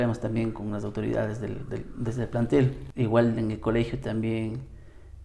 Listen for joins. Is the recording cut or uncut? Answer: cut